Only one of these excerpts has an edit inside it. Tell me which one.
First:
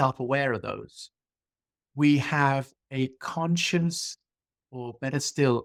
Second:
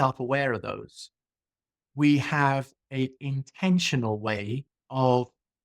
second; 2 cuts; at 3.2 s, 4.7 s

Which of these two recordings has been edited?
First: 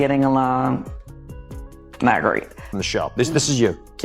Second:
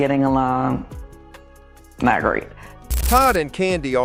first; 1 cut; at 2.8 s

